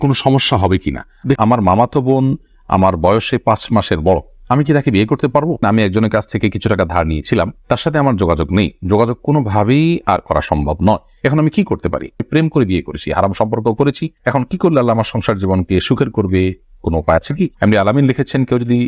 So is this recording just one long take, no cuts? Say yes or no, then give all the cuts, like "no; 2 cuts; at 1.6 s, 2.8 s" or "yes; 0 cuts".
no; 4 cuts; at 1.4 s, 5.6 s, 12.1 s, 17.5 s